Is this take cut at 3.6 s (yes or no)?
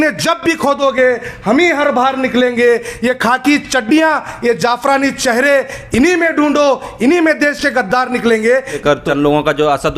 no